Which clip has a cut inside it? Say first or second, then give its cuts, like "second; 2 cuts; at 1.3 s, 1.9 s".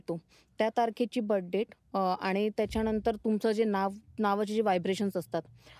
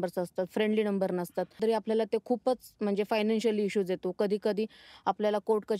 second; 1 cut; at 1.5 s